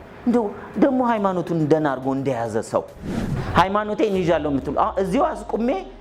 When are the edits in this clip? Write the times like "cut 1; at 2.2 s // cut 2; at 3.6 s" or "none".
cut 1; at 3.3 s